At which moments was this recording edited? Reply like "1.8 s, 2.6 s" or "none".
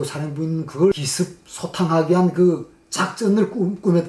none